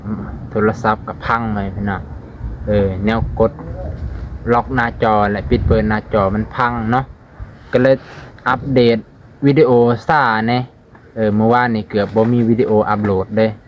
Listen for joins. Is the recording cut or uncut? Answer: uncut